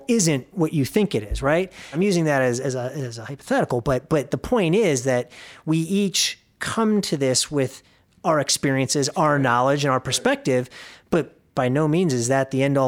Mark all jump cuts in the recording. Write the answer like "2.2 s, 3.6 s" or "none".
1.9 s